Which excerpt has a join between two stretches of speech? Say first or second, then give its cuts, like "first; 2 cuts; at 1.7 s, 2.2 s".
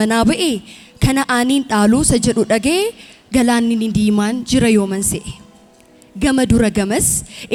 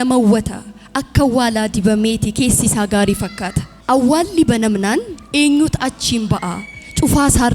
second; 1 cut; at 3.7 s